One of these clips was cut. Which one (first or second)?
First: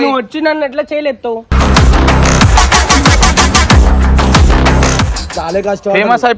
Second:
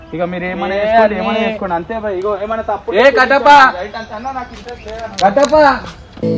first